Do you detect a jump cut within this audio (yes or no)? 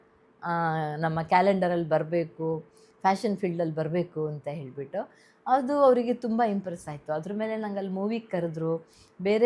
no